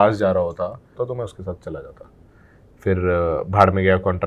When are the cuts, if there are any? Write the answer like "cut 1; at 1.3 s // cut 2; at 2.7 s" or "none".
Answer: cut 1; at 1.0 s